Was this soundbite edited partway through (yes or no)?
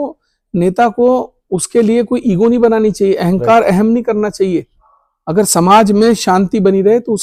no